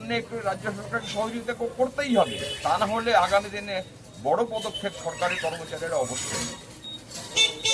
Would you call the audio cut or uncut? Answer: cut